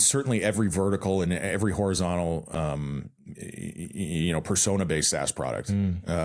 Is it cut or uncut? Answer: uncut